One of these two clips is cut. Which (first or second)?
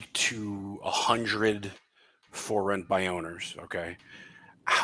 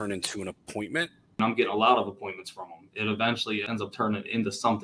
second